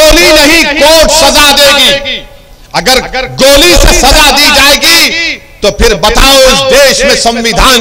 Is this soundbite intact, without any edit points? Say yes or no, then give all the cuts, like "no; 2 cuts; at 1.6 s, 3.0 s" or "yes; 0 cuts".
yes; 0 cuts